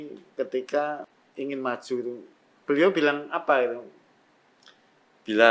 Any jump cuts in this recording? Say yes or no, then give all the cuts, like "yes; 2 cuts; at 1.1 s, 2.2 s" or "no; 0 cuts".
yes; 1 cut; at 1.2 s